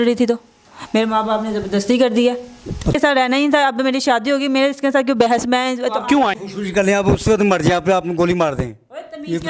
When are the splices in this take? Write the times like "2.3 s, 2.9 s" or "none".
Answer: 2.9 s, 6.4 s